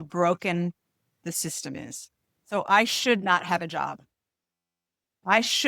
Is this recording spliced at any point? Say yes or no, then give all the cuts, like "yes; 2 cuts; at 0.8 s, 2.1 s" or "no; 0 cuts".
no; 0 cuts